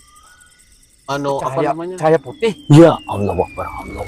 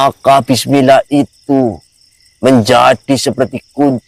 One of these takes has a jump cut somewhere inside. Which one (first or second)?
first